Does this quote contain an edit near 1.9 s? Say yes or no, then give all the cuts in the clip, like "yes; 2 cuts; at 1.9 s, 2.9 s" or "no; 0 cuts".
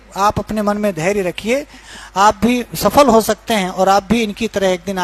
yes; 1 cut; at 1.9 s